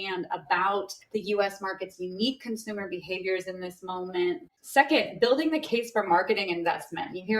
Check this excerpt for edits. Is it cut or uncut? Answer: cut